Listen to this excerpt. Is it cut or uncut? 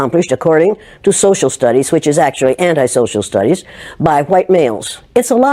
uncut